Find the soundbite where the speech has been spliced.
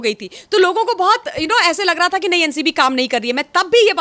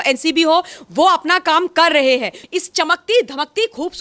second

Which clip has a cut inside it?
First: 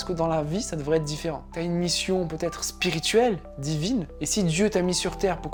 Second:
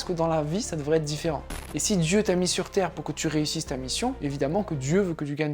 second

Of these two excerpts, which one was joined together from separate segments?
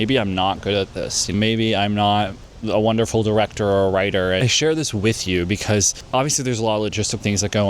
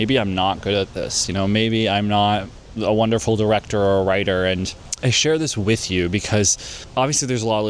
first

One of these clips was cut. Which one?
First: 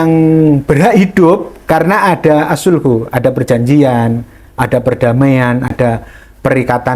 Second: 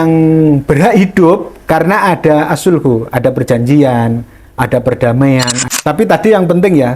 second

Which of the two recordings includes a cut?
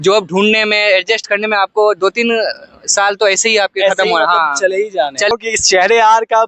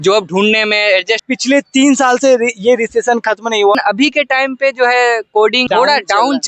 second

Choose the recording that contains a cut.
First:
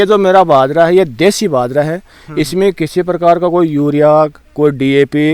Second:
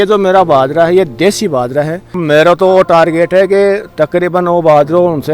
second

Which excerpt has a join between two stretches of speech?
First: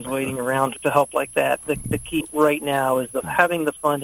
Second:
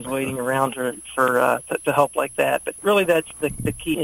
first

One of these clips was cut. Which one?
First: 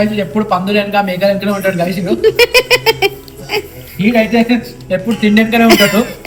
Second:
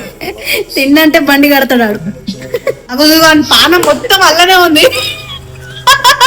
second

